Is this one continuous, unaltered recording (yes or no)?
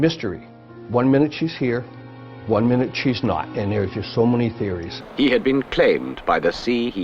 no